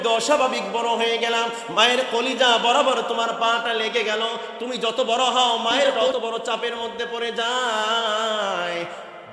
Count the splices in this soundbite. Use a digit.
1